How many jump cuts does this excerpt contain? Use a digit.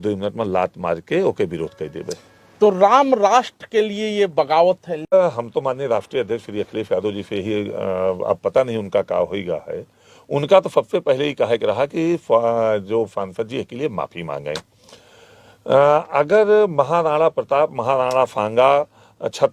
1